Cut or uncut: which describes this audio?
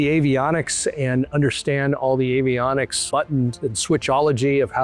uncut